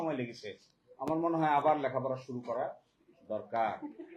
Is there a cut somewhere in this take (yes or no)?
no